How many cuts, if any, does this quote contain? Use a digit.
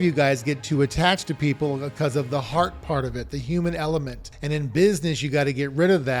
0